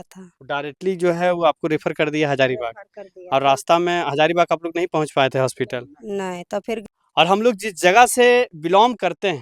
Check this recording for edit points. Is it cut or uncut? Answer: cut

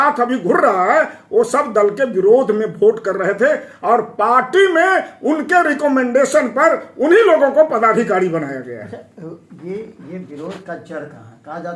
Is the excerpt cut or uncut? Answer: uncut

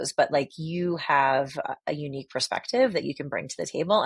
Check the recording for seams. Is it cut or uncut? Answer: uncut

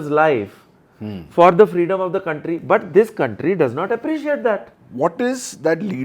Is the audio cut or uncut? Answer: cut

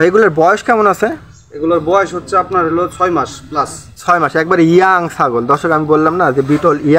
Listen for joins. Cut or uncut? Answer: uncut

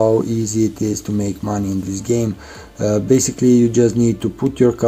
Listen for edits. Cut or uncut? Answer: uncut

